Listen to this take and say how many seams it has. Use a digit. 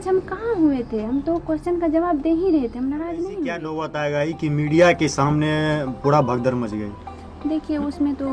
1